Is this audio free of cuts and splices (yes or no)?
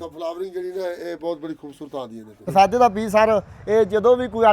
no